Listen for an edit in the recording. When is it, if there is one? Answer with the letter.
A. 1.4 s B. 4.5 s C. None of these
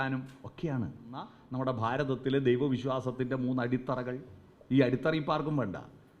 A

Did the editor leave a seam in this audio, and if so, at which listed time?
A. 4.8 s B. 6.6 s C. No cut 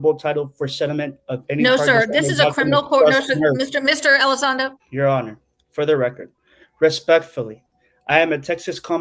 A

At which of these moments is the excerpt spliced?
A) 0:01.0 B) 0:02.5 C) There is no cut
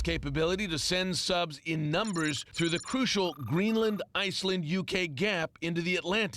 C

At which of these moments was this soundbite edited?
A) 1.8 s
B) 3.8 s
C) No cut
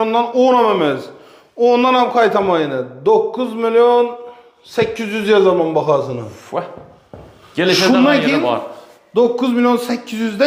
C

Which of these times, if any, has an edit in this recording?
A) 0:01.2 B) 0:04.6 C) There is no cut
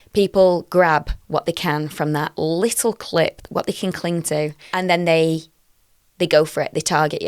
B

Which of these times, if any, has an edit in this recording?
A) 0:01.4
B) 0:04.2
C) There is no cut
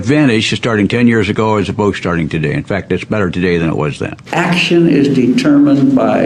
B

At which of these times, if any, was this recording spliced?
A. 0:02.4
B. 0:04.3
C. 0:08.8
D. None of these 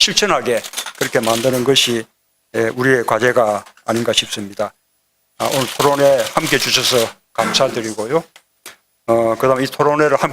B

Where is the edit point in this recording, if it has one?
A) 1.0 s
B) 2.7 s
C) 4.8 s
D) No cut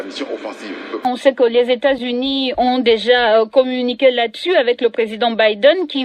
A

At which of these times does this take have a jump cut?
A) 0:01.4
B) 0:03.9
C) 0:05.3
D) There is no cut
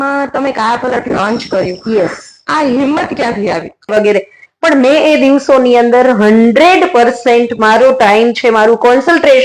B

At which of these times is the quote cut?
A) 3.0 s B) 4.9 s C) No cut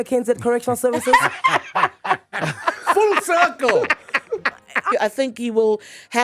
B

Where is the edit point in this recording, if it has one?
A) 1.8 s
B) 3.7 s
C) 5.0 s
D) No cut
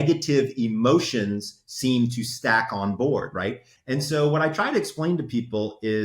B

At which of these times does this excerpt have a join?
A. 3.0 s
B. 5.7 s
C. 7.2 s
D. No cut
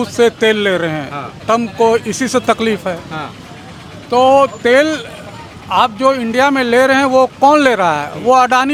D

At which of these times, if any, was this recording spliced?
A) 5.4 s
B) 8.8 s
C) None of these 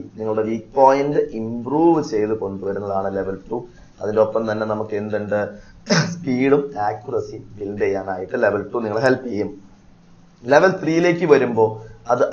C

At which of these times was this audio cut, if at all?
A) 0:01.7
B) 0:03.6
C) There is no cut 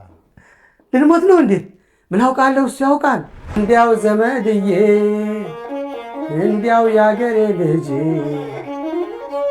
B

